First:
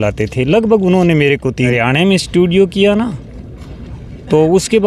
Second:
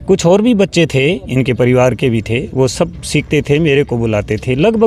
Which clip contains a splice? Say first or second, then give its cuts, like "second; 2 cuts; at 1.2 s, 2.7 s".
first; 1 cut; at 1.7 s